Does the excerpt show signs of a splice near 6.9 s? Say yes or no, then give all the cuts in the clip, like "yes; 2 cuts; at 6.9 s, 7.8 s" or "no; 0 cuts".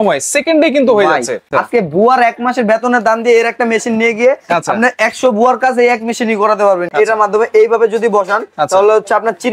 yes; 2 cuts; at 1.5 s, 6.9 s